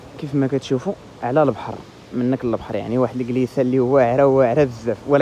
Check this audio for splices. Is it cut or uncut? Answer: uncut